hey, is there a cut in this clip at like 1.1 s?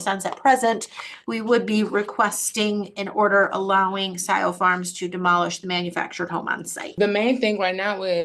no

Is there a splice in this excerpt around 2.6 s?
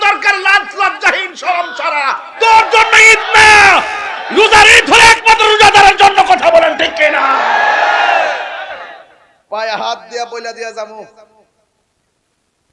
no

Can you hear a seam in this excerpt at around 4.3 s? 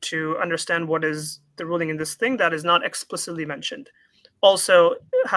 no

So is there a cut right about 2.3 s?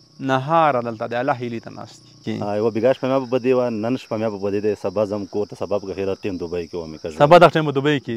yes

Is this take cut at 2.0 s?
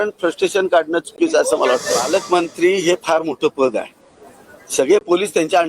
yes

